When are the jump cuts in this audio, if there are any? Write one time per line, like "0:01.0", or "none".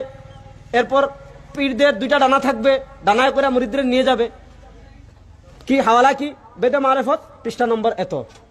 none